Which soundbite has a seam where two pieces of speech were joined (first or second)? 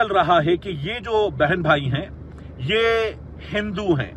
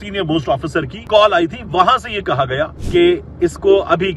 second